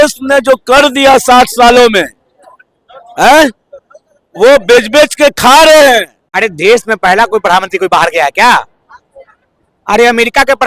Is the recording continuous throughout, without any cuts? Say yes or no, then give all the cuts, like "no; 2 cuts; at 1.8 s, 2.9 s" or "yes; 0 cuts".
no; 1 cut; at 6.2 s